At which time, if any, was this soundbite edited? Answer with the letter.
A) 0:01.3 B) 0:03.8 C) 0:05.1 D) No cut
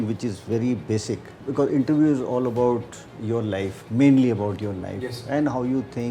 A